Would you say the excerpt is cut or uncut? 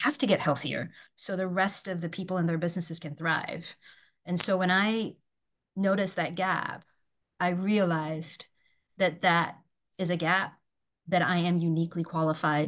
uncut